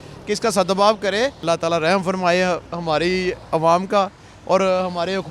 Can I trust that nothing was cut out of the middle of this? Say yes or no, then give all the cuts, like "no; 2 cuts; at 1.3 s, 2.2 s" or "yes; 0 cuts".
no; 1 cut; at 1.4 s